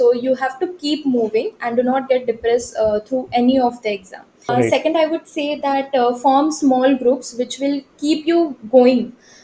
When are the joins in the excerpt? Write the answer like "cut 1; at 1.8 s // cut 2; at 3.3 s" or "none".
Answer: cut 1; at 4.5 s